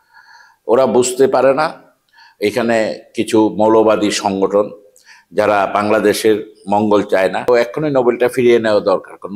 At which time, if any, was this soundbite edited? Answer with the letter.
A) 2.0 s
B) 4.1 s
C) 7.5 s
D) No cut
C